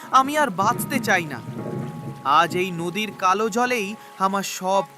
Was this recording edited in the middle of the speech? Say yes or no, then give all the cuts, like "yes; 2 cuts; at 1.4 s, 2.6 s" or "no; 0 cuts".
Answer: no; 0 cuts